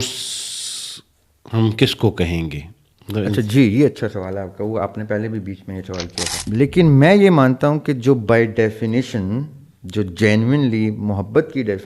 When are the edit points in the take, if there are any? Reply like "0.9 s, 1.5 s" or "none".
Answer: 6.3 s